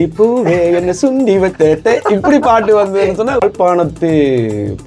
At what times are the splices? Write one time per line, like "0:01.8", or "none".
0:03.4